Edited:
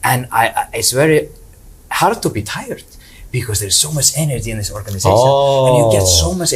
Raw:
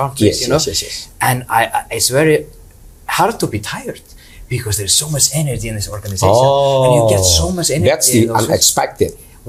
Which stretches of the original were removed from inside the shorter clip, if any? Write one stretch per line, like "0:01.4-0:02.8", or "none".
none